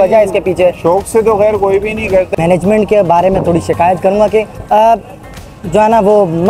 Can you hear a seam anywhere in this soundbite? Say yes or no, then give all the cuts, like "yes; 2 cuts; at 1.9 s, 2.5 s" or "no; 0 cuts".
yes; 2 cuts; at 2.3 s, 4.6 s